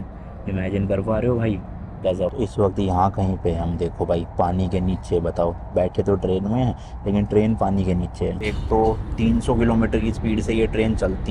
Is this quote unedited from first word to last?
no; 2 cuts; at 2.3 s, 8.6 s

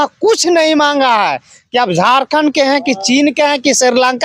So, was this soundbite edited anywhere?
no; 0 cuts

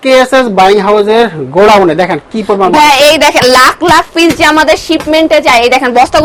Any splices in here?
no; 0 cuts

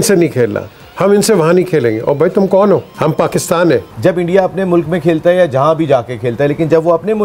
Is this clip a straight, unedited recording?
no; 1 cut; at 3.9 s

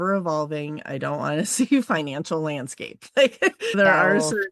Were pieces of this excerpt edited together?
no; 0 cuts

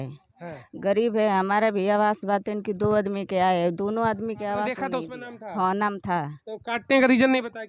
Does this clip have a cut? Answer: yes; 1 cut; at 4.8 s

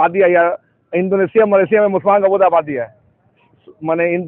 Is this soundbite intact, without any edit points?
yes; 0 cuts

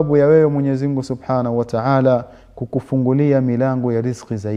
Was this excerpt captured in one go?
yes; 0 cuts

